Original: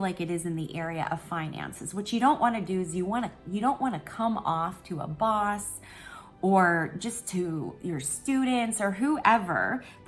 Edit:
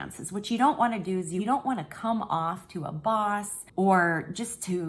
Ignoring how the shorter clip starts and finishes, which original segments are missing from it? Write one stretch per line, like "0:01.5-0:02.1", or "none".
0:03.0-0:03.5
0:05.7-0:06.2